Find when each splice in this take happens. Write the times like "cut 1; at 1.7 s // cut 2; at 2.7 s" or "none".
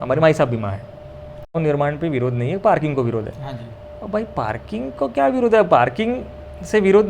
cut 1; at 1.6 s